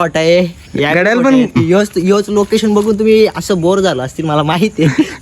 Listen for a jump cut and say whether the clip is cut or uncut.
cut